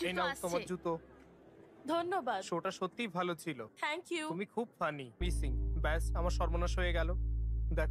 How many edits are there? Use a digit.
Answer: 2